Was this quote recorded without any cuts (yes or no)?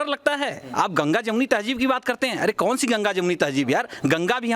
yes